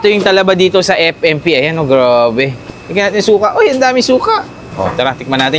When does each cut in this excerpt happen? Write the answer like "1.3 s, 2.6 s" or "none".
2.6 s, 4.6 s